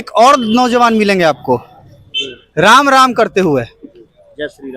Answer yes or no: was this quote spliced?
no